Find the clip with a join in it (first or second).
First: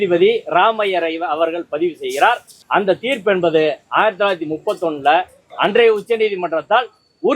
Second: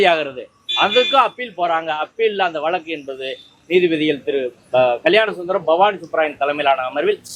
first